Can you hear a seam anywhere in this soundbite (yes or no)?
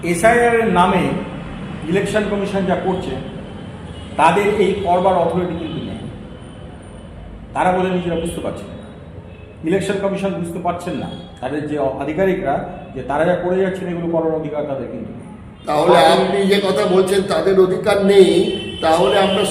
no